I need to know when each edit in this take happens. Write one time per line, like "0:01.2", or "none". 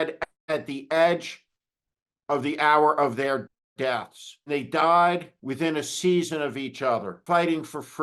0:04.5
0:05.4
0:07.1

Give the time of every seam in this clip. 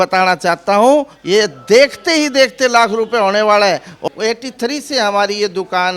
0:04.0

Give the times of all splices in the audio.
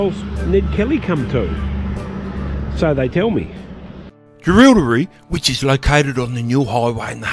none

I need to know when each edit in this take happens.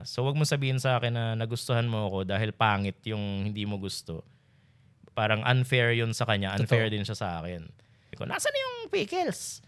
0:08.1

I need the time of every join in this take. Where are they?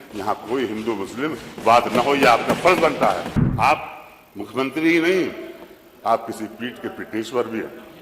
0:03.4

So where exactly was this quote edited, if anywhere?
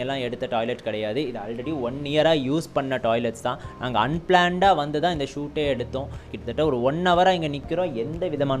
0:06.3

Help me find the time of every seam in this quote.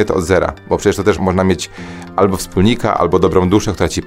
none

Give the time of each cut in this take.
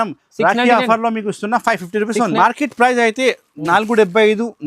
0:02.4

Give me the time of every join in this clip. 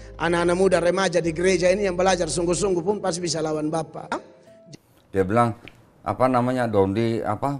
0:04.6

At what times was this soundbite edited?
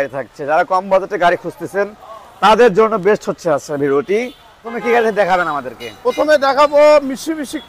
0:04.7

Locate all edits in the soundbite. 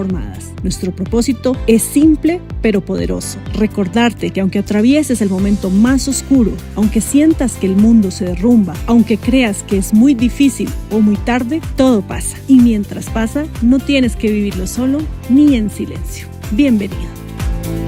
none

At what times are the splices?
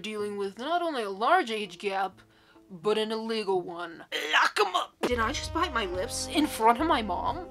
0:05.1

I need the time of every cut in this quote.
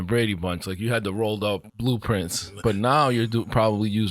0:01.7

